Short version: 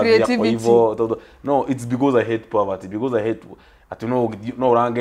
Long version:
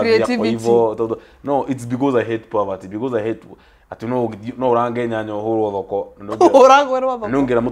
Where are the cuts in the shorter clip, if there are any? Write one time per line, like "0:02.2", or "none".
none